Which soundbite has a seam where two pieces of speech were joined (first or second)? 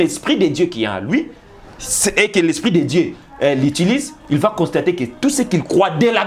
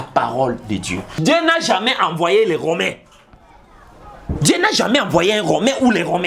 second